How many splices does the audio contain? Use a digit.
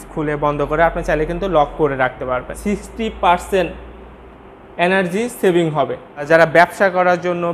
2